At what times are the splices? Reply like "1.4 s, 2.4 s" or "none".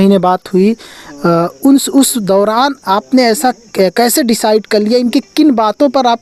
none